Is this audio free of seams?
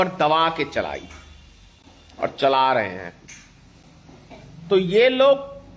yes; 0 cuts

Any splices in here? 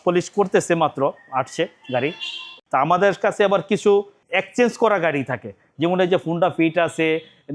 yes; 1 cut; at 2.6 s

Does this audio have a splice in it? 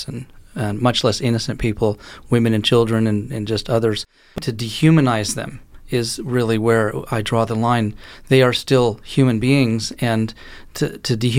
yes; 1 cut; at 4.5 s

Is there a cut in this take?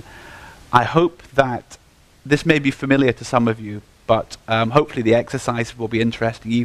no; 0 cuts

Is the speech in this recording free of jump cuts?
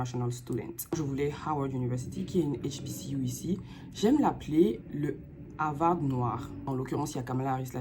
no; 2 cuts; at 0.9 s, 6.7 s

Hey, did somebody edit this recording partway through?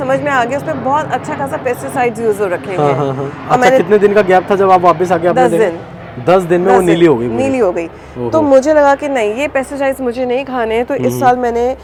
no; 0 cuts

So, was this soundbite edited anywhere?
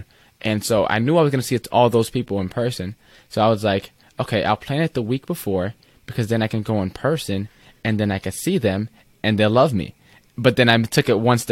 no; 0 cuts

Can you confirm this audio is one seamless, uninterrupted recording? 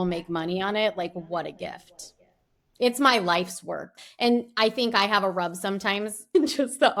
yes; 0 cuts

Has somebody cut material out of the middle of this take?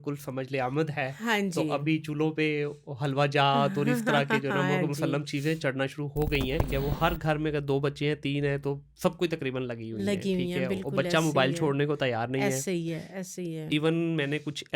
yes; 1 cut; at 6.7 s

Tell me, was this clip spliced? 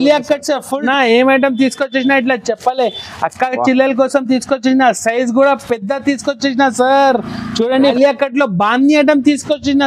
yes; 2 cuts; at 0.8 s, 7.9 s

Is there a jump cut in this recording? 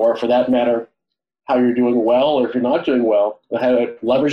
no; 0 cuts

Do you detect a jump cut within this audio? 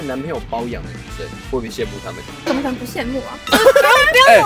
no; 0 cuts

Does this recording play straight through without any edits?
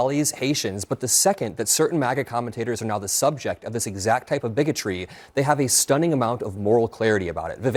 yes; 0 cuts

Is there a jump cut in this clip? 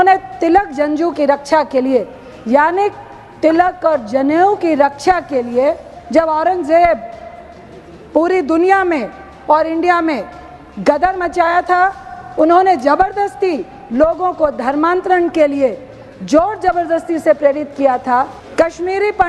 yes; 2 cuts; at 5.9 s, 18.4 s

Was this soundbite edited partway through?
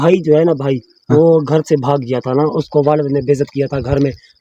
no; 0 cuts

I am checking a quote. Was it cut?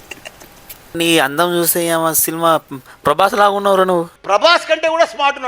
yes; 1 cut; at 0.9 s

